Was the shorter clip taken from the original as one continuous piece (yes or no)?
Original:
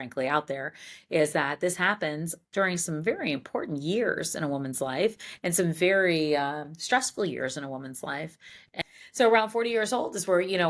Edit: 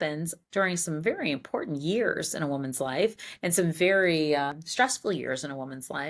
no